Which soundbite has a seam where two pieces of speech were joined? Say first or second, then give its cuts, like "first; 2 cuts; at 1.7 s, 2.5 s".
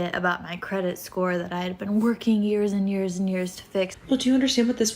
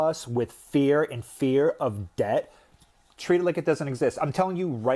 first; 1 cut; at 4.0 s